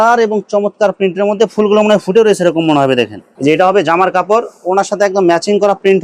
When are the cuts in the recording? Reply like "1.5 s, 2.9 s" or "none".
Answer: none

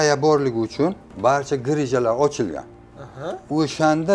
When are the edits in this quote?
1.0 s

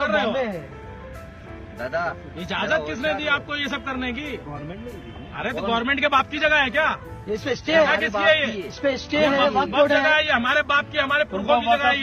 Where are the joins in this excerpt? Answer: none

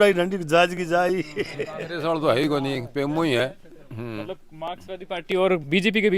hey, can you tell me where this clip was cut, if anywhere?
1.8 s

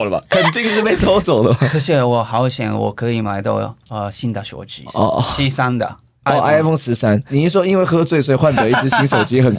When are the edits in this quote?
1.7 s, 4.8 s, 6.2 s, 7.3 s

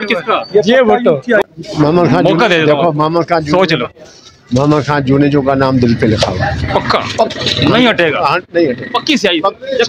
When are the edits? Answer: 1.4 s

